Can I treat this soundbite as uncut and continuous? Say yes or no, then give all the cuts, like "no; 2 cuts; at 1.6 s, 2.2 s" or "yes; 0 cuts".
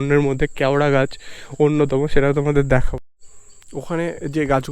no; 1 cut; at 2.9 s